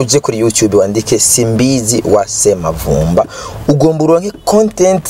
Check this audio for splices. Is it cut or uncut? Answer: uncut